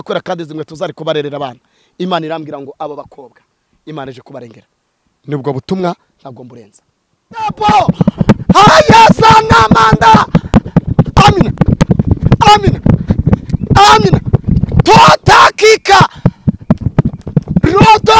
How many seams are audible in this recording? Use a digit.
1